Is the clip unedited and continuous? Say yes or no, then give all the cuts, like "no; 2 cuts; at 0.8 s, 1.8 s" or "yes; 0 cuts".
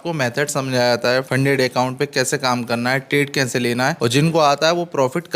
no; 2 cuts; at 1.3 s, 4.0 s